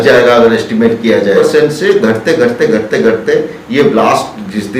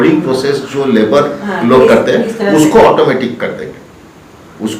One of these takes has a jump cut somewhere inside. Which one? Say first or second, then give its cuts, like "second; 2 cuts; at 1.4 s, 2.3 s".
first; 1 cut; at 1.4 s